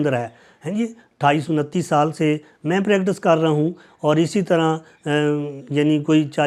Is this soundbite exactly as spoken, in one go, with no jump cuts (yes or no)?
yes